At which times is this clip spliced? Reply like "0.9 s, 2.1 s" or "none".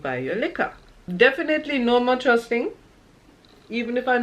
1.1 s